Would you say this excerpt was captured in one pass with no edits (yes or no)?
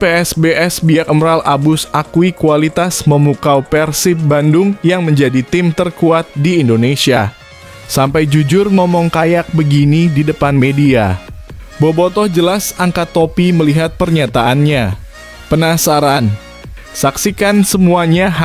yes